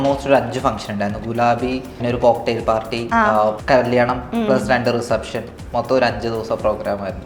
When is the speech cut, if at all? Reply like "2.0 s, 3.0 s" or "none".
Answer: 2.0 s, 3.6 s